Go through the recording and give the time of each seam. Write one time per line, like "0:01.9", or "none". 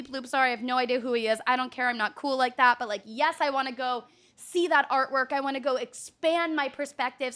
none